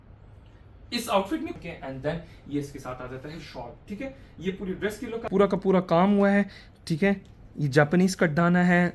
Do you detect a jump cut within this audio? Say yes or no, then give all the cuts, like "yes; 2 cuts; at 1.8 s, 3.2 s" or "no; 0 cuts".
yes; 2 cuts; at 1.5 s, 5.3 s